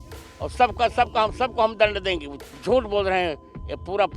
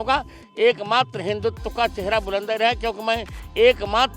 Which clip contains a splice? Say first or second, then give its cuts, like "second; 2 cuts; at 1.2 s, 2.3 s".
first; 1 cut; at 2.4 s